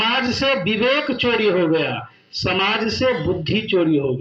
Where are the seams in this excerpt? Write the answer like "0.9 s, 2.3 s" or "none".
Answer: none

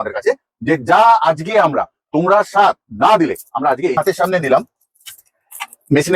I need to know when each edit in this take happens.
4.0 s

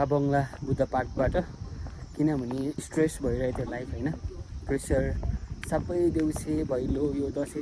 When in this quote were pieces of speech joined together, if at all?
2.8 s

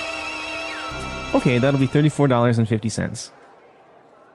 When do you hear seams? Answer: 0.9 s

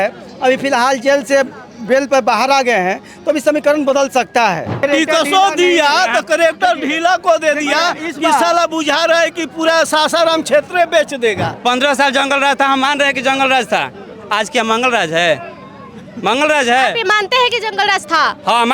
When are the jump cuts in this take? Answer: 4.8 s, 11.5 s

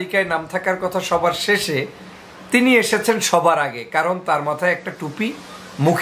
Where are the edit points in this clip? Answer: none

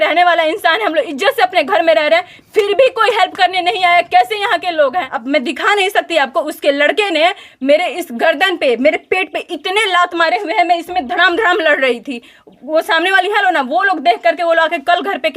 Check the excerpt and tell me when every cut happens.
5.2 s

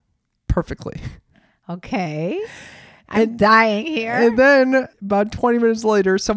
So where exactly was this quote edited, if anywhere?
5.0 s

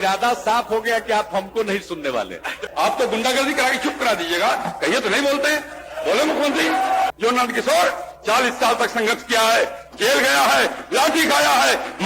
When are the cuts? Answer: 2.6 s, 7.1 s

